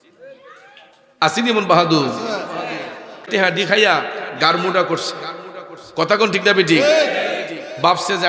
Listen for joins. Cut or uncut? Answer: cut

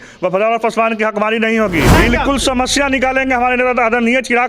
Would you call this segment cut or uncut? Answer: cut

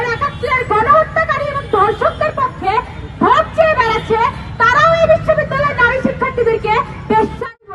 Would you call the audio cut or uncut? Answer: uncut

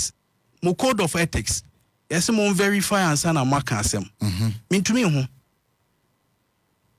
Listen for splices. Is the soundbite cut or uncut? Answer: uncut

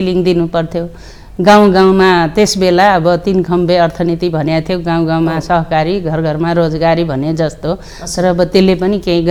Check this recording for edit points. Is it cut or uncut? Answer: uncut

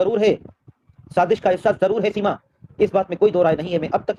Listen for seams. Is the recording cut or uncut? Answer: uncut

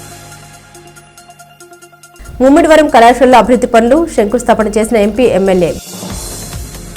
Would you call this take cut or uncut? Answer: uncut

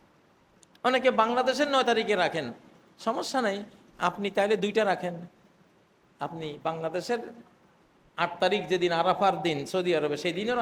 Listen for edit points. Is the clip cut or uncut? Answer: uncut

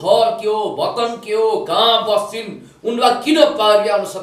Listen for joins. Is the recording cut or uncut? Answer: uncut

